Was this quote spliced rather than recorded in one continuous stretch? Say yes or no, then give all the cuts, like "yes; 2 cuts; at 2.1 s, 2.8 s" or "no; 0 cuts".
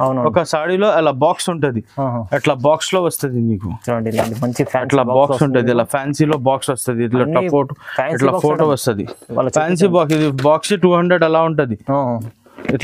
no; 0 cuts